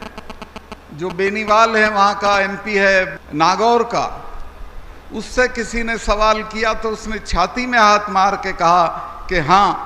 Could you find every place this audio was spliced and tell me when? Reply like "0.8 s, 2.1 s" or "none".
3.2 s